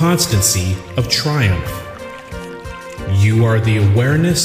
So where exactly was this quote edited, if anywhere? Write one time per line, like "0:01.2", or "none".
0:01.6
0:02.9